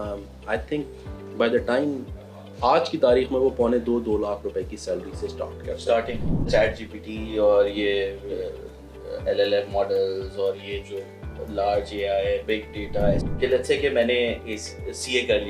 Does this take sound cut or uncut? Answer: cut